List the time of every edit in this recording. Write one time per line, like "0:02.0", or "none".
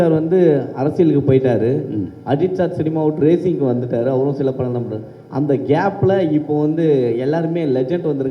none